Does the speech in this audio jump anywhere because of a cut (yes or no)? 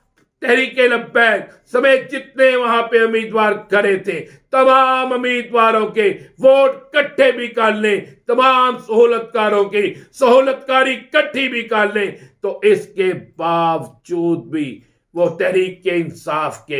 no